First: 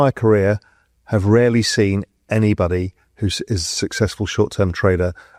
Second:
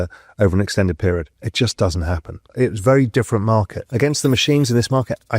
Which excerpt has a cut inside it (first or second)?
second